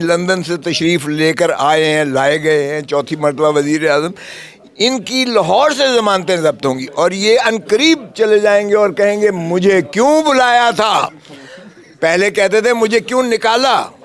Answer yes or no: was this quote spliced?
no